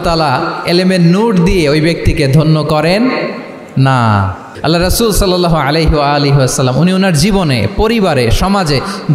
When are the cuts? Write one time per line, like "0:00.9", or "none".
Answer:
0:04.5